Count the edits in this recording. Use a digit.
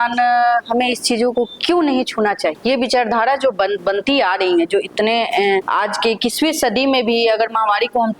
3